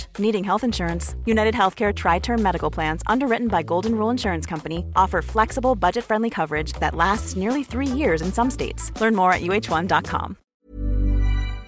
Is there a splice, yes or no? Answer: yes